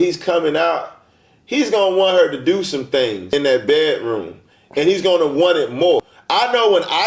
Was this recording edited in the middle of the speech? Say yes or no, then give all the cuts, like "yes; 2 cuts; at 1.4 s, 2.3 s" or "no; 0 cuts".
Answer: yes; 2 cuts; at 3.2 s, 6.1 s